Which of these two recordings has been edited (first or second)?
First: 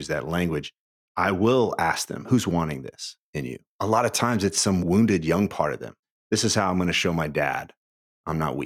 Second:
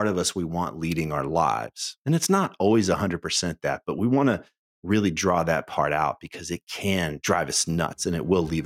first